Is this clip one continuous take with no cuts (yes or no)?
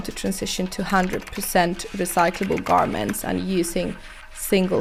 yes